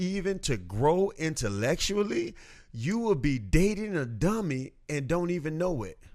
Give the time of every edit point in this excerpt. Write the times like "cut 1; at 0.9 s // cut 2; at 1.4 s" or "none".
none